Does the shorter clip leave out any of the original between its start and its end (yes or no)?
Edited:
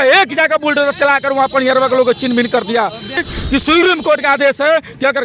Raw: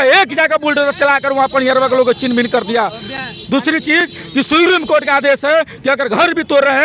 yes